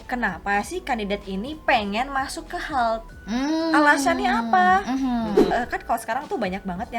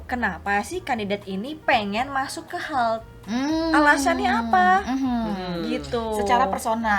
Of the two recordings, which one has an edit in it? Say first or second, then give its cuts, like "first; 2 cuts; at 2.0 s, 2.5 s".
first; 1 cut; at 5.4 s